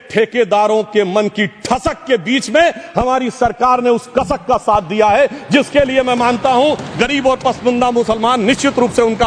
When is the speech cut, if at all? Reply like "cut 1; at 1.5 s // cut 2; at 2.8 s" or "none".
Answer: none